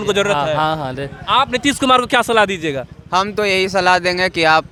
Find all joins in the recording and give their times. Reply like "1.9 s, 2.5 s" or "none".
none